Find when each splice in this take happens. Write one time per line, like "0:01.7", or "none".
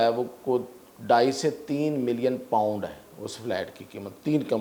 none